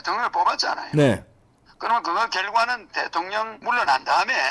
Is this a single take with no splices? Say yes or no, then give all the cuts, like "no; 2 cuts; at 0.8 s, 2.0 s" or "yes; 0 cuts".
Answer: no; 1 cut; at 3.6 s